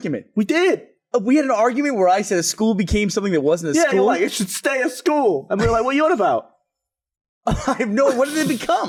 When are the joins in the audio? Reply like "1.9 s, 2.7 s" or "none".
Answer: none